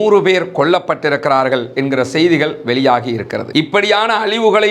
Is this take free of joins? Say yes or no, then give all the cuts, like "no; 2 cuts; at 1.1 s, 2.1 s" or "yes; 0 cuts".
no; 1 cut; at 3.5 s